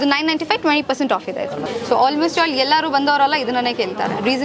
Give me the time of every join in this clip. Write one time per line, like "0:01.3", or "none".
0:01.7

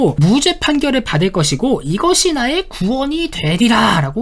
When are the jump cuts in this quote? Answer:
none

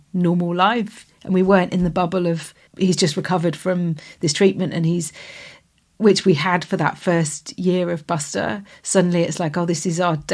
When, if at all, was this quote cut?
0:02.7

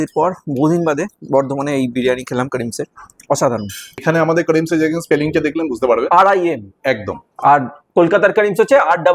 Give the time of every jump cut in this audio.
0:04.0

